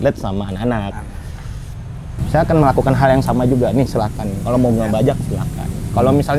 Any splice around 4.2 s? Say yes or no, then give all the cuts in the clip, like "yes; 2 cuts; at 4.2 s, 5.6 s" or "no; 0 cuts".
no; 1 cut; at 2.2 s